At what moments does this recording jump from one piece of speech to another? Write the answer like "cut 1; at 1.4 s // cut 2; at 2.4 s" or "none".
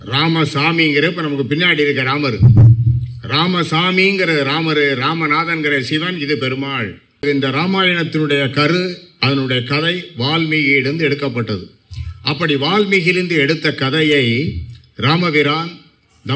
cut 1; at 7.2 s